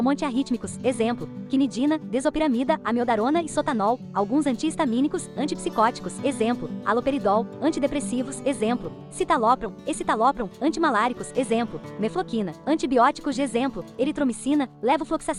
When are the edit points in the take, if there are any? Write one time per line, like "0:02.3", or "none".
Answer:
none